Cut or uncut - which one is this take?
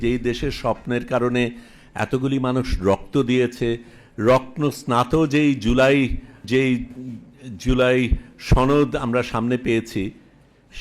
cut